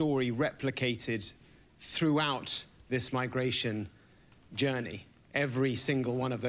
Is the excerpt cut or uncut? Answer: cut